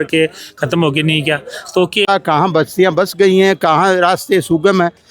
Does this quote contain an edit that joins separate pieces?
yes; 1 cut; at 2.1 s

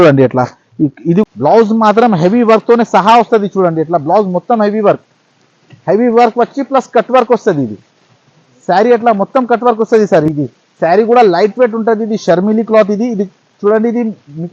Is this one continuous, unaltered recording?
no; 2 cuts; at 1.2 s, 10.3 s

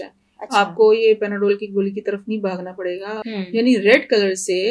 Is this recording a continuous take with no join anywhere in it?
no; 1 cut; at 3.1 s

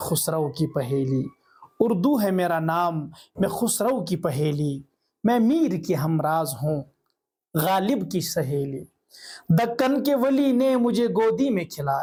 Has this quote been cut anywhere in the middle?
no; 0 cuts

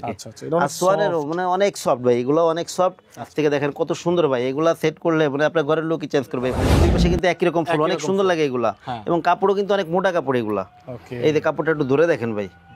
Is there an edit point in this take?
yes; 2 cuts; at 3.3 s, 6.7 s

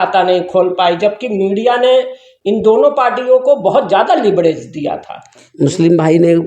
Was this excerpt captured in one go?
no; 1 cut; at 5.5 s

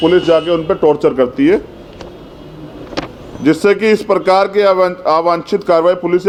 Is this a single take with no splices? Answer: yes; 0 cuts

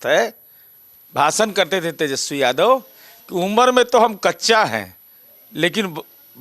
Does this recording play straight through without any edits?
yes; 0 cuts

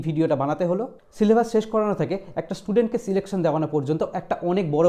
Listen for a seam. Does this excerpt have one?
yes; 1 cut; at 0.9 s

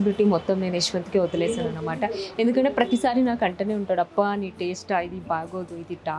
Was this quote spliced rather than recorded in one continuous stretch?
no; 0 cuts

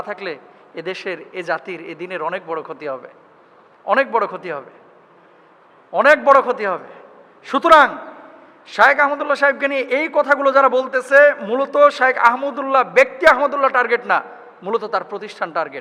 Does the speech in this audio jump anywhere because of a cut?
no; 0 cuts

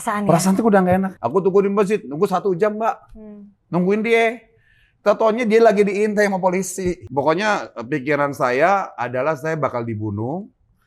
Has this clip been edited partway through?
yes; 2 cuts; at 1.2 s, 7.0 s

